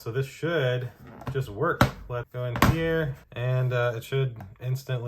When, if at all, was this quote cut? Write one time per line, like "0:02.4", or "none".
0:03.2